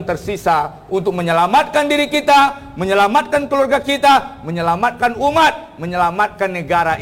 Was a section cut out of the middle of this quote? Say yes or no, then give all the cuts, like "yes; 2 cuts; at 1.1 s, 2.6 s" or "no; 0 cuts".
no; 0 cuts